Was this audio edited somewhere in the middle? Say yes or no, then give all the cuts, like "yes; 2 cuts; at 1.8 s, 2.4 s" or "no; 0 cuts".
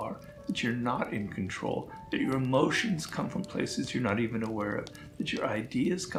no; 0 cuts